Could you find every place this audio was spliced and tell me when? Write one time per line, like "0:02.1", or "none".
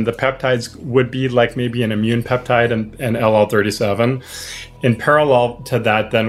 0:04.6